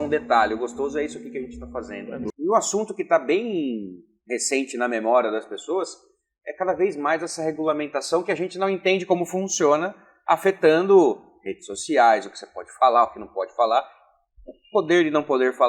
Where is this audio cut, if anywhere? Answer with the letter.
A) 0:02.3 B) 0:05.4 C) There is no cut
A